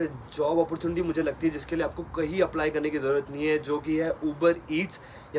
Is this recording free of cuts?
yes; 0 cuts

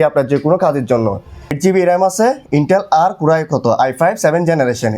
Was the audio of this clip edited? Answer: yes; 1 cut; at 1.6 s

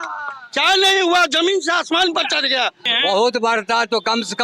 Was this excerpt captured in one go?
no; 1 cut; at 2.9 s

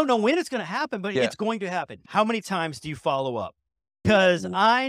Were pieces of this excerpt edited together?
yes; 2 cuts; at 2.0 s, 4.0 s

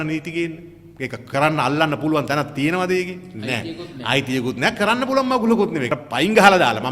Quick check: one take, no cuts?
no; 1 cut; at 5.9 s

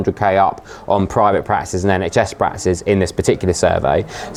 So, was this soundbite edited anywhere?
no; 0 cuts

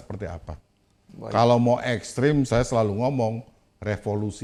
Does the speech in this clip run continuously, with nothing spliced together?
yes; 0 cuts

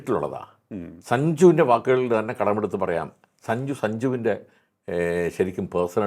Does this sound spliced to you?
no; 0 cuts

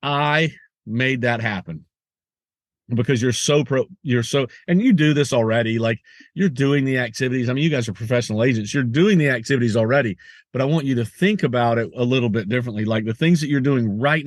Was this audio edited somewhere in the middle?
no; 0 cuts

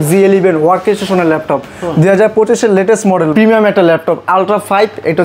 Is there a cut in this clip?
yes; 1 cut; at 3.3 s

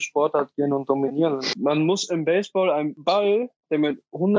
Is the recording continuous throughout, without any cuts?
no; 2 cuts; at 1.5 s, 2.9 s

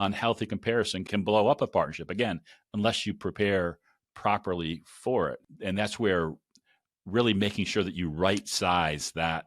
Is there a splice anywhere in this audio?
yes; 2 cuts; at 1.0 s, 5.4 s

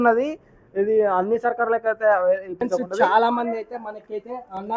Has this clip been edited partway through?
yes; 1 cut; at 2.6 s

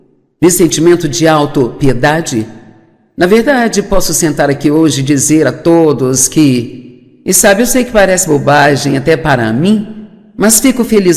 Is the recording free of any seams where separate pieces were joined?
no; 1 cut; at 6.0 s

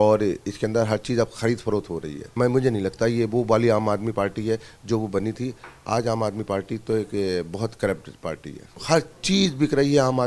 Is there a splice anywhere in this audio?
yes; 2 cuts; at 2.2 s, 8.8 s

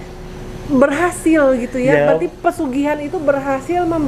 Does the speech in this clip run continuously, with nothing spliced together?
yes; 0 cuts

